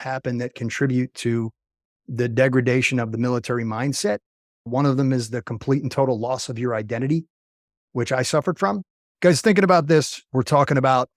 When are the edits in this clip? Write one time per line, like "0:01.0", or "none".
0:10.2